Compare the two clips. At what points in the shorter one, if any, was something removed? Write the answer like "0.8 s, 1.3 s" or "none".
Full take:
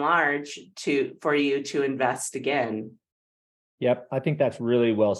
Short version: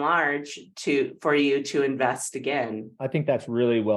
2.9 s